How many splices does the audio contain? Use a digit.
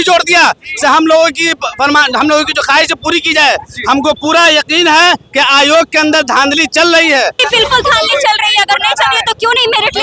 1